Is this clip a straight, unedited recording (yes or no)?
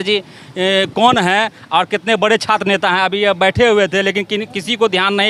yes